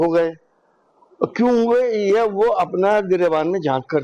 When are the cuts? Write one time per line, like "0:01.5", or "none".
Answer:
none